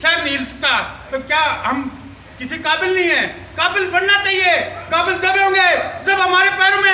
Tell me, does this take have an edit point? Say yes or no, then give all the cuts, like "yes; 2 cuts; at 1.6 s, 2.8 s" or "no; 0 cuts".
no; 0 cuts